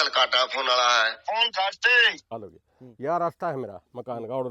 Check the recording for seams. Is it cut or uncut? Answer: cut